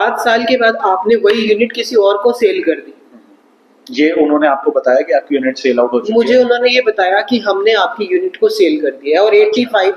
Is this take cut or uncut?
uncut